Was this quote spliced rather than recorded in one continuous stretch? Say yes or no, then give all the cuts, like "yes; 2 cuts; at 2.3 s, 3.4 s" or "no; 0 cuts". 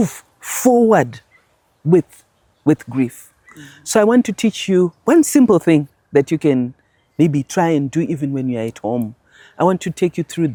no; 0 cuts